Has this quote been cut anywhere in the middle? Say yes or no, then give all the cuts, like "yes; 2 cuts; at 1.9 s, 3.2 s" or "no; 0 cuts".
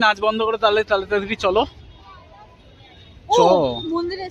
no; 0 cuts